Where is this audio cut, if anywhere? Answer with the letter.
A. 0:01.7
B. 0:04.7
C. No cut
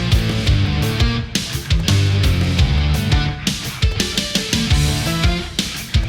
C